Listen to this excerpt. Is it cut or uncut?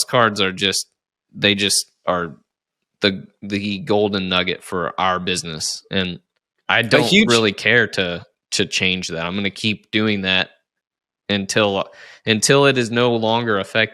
uncut